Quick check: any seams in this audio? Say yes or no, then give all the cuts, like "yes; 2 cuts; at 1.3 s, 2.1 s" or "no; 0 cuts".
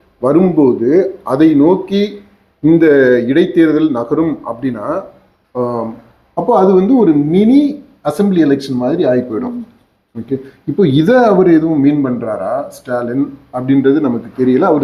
no; 0 cuts